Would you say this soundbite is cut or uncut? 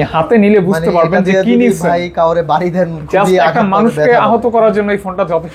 uncut